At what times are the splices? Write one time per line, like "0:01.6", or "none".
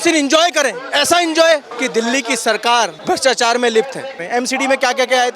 0:01.8
0:03.0
0:04.2